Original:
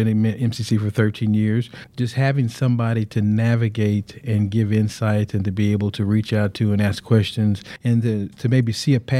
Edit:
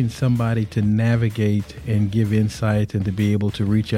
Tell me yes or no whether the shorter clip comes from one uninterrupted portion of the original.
yes